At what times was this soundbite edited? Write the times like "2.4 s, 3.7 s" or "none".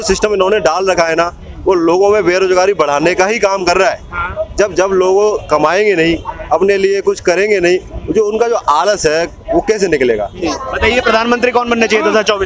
10.3 s